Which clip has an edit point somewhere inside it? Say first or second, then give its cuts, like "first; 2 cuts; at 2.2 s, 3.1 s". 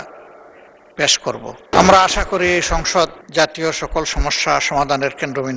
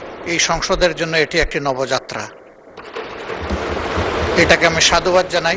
first; 2 cuts; at 1.7 s, 3.2 s